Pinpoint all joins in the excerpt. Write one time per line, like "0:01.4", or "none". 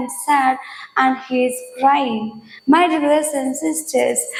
none